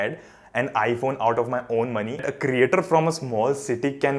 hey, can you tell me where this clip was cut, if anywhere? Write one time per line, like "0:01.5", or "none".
0:02.3